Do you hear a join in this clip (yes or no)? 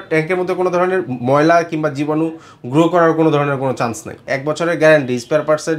yes